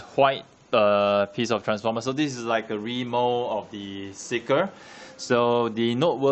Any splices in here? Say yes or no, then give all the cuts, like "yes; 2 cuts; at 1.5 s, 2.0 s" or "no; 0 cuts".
yes; 1 cut; at 4.4 s